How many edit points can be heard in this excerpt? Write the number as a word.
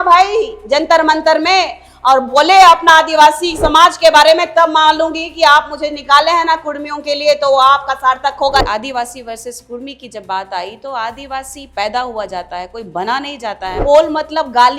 two